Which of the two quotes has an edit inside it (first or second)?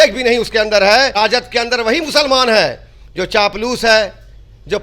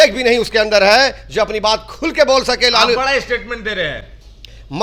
first